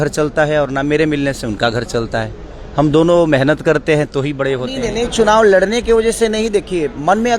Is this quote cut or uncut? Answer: cut